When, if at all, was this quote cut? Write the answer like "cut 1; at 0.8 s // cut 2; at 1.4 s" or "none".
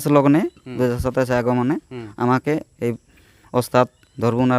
none